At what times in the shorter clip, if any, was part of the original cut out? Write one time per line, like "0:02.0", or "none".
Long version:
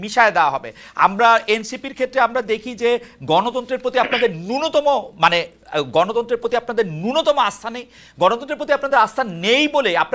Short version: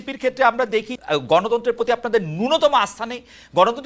0:00.9

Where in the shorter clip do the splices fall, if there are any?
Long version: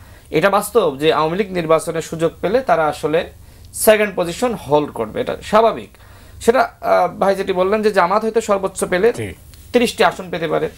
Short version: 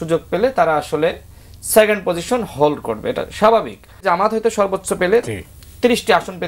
0:04.0

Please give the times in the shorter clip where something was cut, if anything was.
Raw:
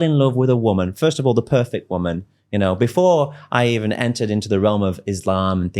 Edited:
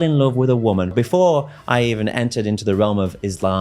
0:00.9

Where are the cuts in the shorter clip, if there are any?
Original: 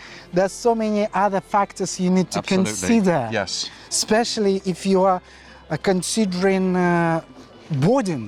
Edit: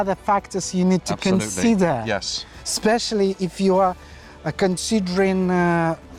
none

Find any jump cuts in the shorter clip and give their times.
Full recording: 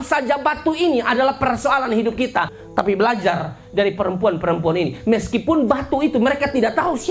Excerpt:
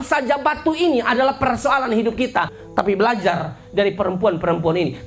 none

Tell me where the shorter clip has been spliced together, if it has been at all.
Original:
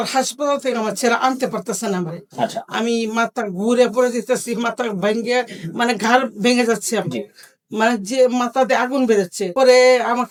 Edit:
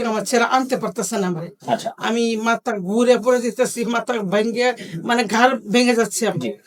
none

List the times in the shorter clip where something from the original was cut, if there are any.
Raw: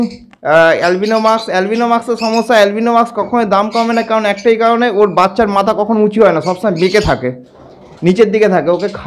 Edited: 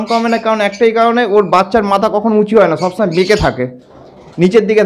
none

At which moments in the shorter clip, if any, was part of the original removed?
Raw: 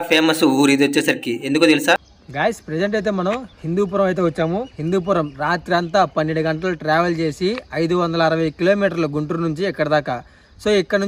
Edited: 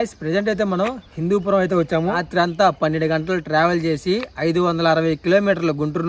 0:02.2

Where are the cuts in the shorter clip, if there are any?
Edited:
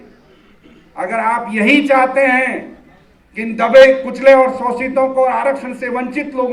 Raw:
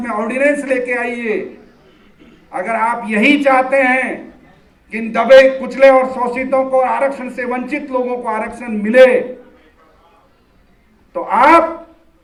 none

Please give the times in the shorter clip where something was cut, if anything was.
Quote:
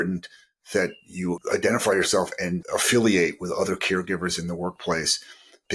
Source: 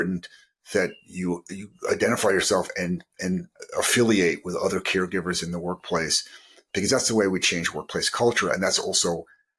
0:01.4
0:02.6

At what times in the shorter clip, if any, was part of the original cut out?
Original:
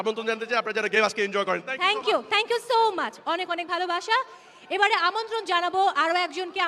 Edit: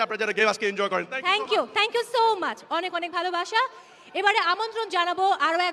none

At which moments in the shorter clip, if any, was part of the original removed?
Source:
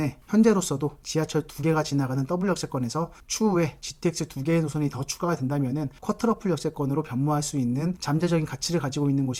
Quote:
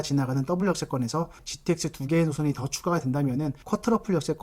0:01.4

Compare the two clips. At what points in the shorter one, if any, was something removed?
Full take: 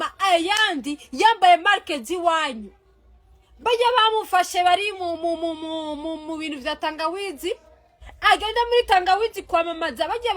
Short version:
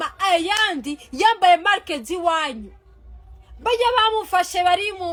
none

